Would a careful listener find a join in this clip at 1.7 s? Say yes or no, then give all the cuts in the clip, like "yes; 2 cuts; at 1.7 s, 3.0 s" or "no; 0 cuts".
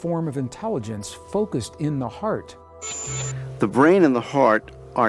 no; 1 cut; at 3.1 s